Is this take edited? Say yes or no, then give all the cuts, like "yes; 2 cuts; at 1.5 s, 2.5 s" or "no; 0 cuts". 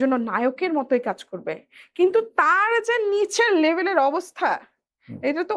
no; 0 cuts